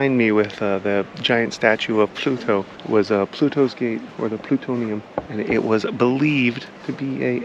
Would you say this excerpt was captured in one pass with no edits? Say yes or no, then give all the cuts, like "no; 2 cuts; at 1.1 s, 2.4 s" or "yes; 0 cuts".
no; 2 cuts; at 2.8 s, 5.2 s